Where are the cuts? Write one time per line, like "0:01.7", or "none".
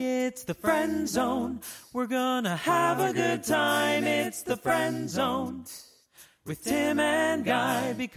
none